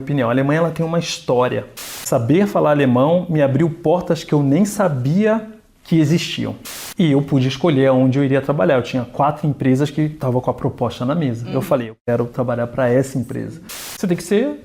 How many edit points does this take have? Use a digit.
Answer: 3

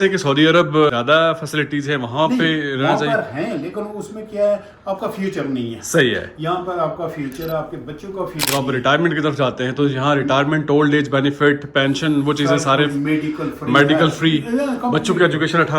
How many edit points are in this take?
2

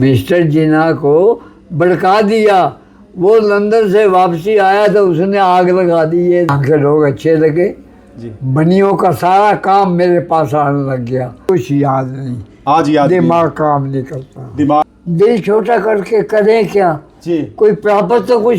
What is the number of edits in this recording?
3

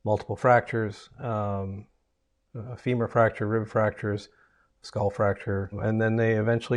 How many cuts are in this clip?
1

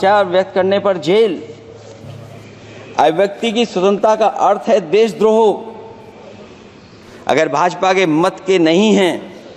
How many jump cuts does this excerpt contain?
0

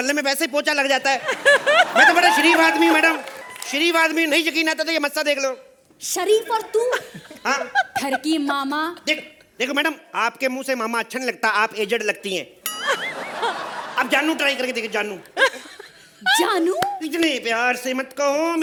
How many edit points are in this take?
0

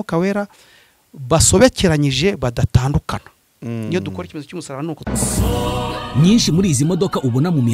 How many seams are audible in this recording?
1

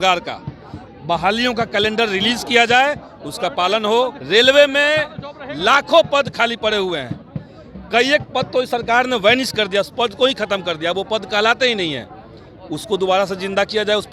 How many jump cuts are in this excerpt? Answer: 1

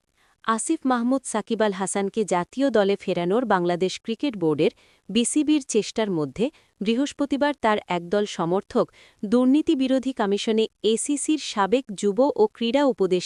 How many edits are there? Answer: 0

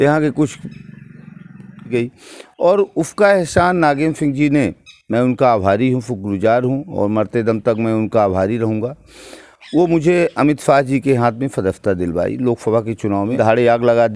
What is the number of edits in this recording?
2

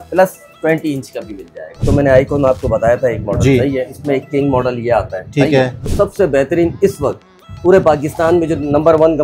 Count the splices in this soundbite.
2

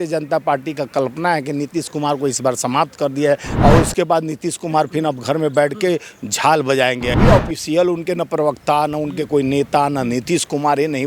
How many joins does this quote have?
2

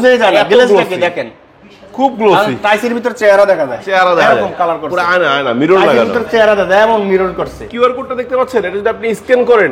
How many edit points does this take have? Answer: 1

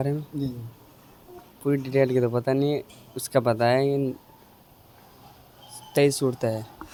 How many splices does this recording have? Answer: 0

